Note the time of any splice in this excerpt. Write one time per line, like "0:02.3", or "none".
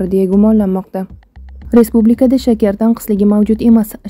0:01.6